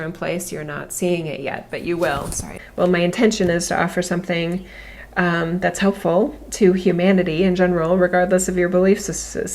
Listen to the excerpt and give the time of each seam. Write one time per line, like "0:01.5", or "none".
0:02.5